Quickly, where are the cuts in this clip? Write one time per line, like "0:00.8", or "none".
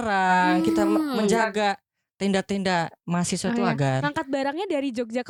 none